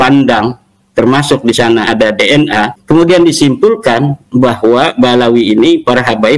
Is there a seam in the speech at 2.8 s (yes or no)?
yes